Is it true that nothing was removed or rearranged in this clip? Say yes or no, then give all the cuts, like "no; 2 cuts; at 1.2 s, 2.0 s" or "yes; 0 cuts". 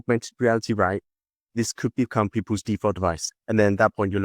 no; 1 cut; at 3.3 s